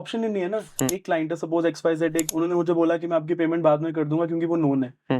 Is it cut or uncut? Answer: cut